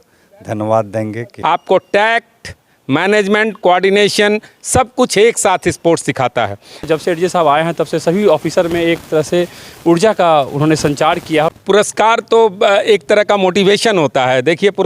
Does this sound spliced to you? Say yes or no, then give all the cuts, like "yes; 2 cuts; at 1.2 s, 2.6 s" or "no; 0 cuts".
yes; 3 cuts; at 1.3 s, 6.9 s, 11.5 s